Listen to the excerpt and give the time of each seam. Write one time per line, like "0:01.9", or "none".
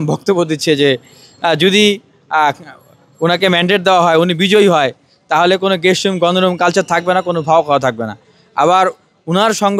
none